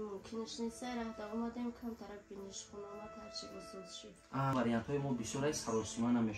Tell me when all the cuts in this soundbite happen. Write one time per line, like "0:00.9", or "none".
0:04.5